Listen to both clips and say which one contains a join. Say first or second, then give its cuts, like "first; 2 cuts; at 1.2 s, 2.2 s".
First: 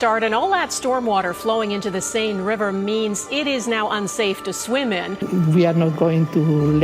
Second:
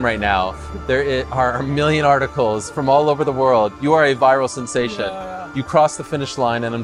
first; 1 cut; at 5.2 s